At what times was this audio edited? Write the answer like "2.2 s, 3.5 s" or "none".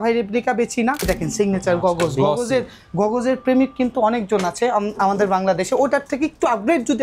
1.1 s